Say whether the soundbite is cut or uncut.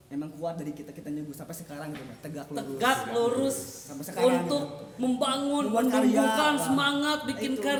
uncut